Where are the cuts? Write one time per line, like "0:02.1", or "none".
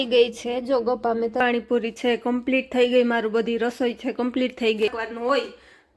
0:01.4
0:04.9